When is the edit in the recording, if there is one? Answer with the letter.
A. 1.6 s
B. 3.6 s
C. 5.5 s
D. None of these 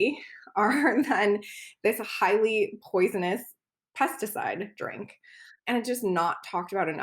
C